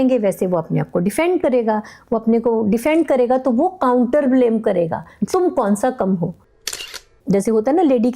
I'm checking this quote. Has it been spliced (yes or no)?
yes